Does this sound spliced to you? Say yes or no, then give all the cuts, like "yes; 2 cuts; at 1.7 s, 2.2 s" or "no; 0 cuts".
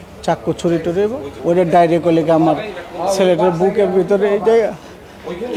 yes; 1 cut; at 1.3 s